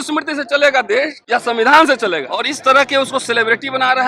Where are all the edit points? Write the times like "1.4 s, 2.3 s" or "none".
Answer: 1.2 s, 2.5 s

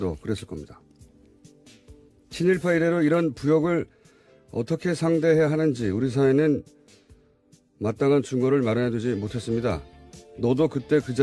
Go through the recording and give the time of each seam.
8.9 s

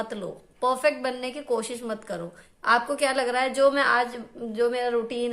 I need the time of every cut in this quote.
2.4 s

